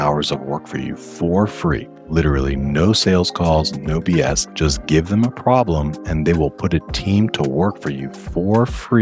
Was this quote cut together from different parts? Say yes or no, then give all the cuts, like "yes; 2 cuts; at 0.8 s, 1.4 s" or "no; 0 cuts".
yes; 2 cuts; at 1.9 s, 4.5 s